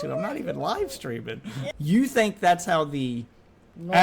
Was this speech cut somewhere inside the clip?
yes; 1 cut; at 1.7 s

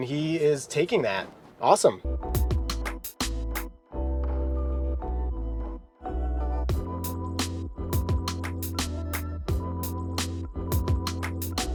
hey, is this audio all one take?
yes; 0 cuts

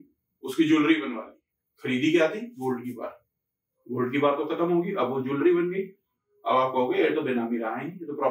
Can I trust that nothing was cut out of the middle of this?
yes; 0 cuts

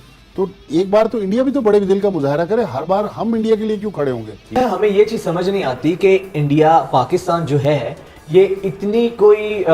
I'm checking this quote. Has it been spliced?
yes; 1 cut; at 4.5 s

